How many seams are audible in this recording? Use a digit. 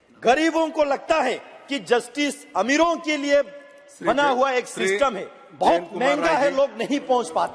0